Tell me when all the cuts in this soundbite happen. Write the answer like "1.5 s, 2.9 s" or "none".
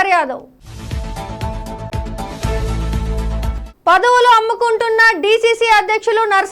1.9 s, 3.6 s